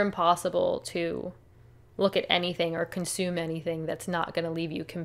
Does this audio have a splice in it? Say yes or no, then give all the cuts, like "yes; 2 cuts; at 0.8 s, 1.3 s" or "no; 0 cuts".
no; 0 cuts